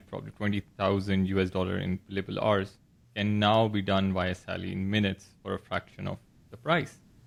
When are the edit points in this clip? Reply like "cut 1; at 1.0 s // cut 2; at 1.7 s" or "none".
none

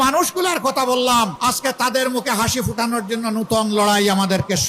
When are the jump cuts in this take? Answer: cut 1; at 1.3 s

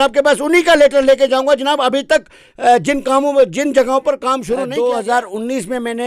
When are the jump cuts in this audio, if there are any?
cut 1; at 4.5 s

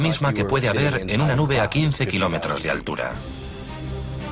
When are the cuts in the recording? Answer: cut 1; at 2.6 s

